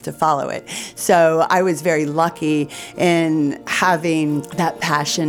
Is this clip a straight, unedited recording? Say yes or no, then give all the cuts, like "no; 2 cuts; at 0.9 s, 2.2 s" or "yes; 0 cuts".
no; 2 cuts; at 3.7 s, 4.5 s